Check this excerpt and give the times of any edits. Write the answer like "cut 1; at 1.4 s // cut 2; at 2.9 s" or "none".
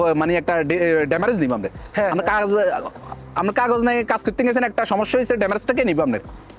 none

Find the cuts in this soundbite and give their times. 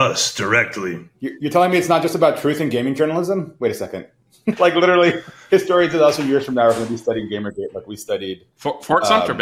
cut 1; at 1.1 s // cut 2; at 4.6 s

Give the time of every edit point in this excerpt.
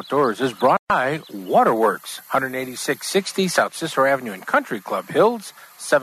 cut 1; at 0.9 s

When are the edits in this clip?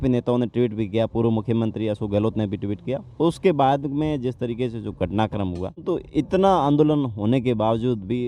cut 1; at 5.8 s

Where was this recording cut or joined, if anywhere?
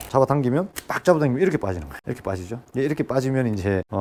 none

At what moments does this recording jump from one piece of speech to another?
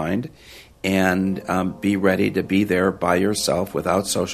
none

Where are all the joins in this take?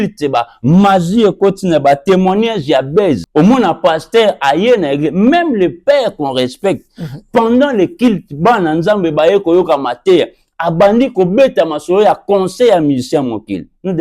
cut 1; at 3.2 s

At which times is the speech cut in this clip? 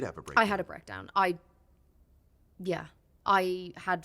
none

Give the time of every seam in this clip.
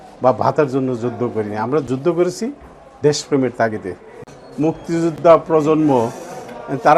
cut 1; at 4.2 s

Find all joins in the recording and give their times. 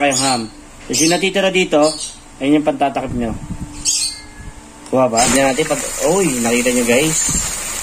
cut 1; at 5.1 s

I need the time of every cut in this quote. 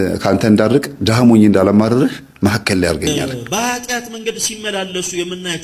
cut 1; at 3.2 s

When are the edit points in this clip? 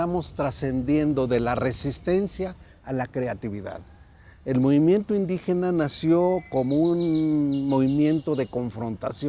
none

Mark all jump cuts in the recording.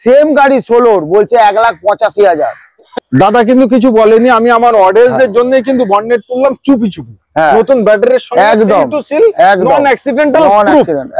cut 1; at 2.9 s

